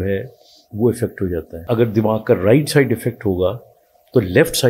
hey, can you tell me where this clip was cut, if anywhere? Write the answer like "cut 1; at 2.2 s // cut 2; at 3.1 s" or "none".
cut 1; at 1.5 s

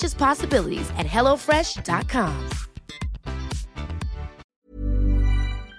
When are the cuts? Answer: cut 1; at 4.5 s

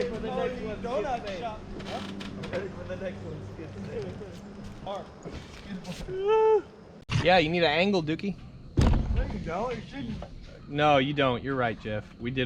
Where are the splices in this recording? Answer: cut 1; at 4.9 s // cut 2; at 7.2 s

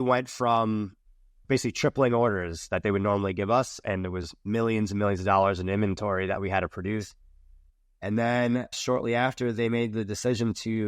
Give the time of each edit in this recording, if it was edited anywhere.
cut 1; at 1.4 s // cut 2; at 4.0 s // cut 3; at 8.8 s

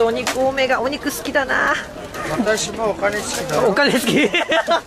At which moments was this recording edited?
none

